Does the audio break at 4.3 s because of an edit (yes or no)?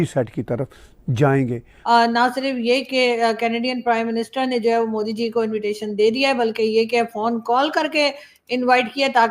no